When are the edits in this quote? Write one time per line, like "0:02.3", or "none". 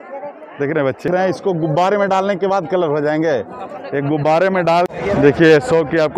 0:01.1
0:04.9

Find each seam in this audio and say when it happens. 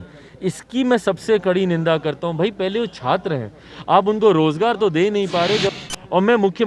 0:05.7

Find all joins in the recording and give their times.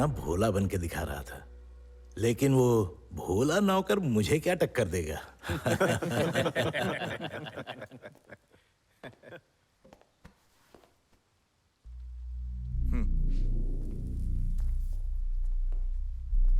none

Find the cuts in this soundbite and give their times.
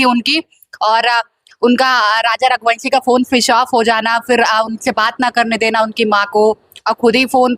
none

